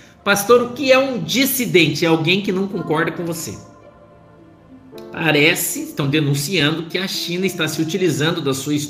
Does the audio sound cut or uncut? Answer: cut